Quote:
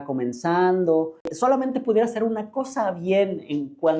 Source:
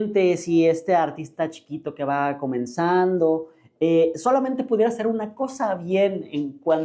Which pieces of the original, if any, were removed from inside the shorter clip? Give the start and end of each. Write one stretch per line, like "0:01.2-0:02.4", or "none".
0:03.7-0:04.2

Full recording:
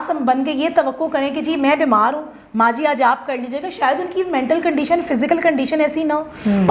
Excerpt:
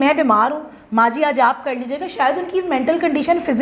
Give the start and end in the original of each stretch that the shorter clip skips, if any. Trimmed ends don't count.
none

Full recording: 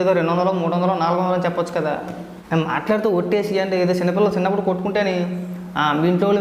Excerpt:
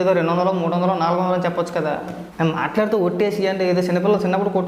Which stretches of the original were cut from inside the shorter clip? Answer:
0:02.2-0:02.3

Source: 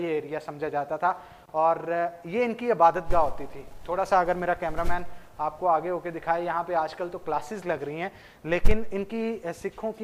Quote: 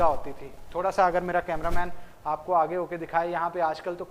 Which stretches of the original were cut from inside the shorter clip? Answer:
none

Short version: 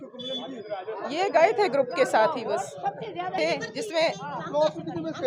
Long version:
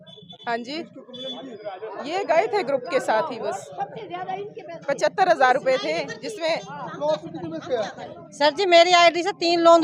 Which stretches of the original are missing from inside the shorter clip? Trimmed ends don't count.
0:04.3-0:05.8

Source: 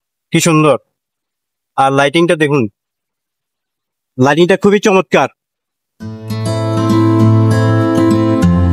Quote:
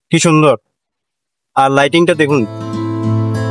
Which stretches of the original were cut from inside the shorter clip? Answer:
0:02.8-0:06.8

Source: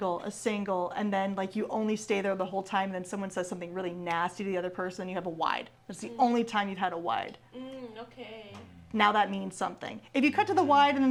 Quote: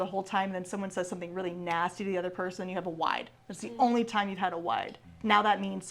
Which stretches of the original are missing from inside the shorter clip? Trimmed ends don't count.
0:07.4-0:08.7

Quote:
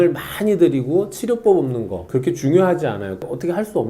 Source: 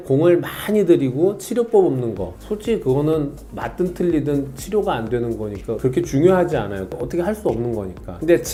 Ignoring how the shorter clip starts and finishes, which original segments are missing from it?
0:02.3-0:05.7

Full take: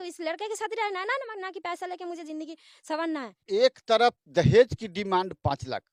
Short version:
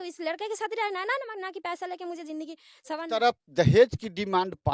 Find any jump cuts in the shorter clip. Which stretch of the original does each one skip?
0:03.0-0:03.8

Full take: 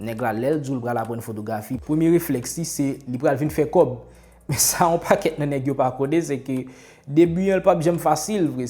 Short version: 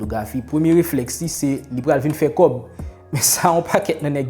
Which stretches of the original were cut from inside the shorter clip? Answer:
none

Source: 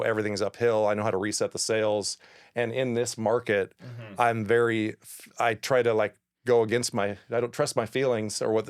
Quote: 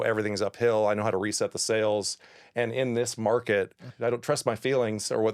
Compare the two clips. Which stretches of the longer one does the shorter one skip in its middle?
0:03.9-0:07.2

